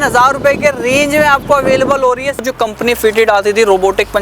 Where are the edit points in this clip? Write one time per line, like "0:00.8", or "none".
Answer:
0:02.4